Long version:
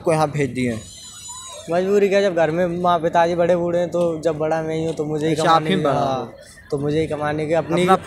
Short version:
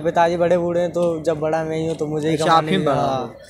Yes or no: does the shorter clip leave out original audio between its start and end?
no